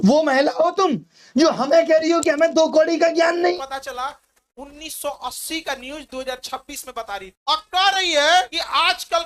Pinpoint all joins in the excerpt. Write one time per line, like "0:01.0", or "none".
0:03.5